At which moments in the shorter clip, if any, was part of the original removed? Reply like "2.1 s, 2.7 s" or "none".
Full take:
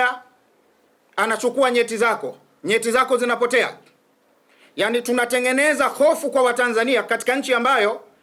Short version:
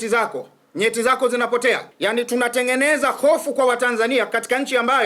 1.9 s